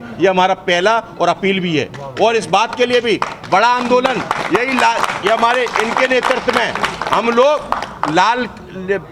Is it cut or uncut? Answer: uncut